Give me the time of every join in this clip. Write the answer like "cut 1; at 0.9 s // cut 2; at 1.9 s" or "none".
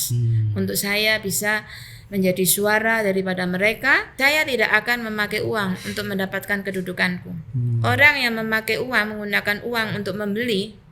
cut 1; at 4.1 s